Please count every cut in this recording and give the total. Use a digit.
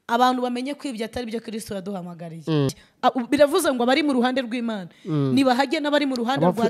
1